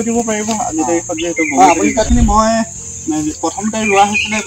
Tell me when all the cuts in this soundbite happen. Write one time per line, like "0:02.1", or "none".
0:02.1